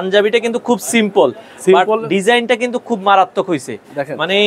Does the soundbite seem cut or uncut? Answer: uncut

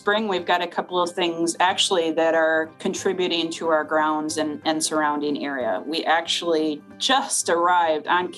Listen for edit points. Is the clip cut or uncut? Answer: cut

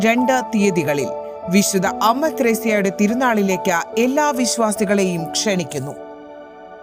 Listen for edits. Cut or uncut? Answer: uncut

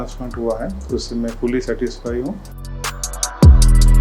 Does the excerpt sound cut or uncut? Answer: cut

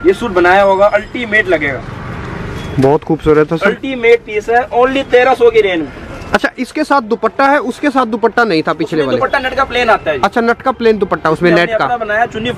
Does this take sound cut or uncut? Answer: uncut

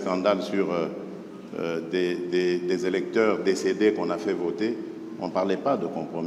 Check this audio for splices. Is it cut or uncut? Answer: uncut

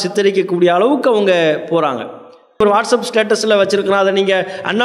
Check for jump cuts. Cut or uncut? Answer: cut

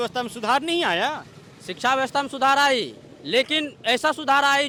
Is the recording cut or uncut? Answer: uncut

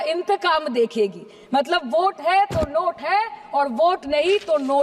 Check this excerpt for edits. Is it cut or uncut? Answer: uncut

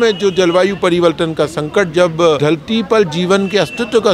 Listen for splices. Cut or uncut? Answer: cut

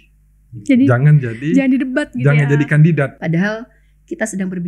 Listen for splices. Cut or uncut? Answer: cut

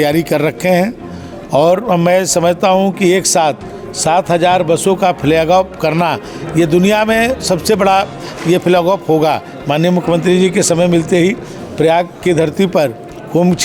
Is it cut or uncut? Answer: uncut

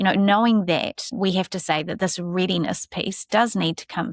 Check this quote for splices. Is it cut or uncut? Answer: cut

